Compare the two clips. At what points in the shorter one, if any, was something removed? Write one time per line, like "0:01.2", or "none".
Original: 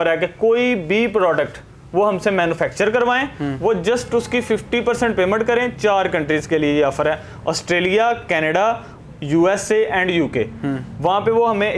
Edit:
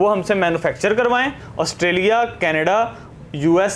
0:01.4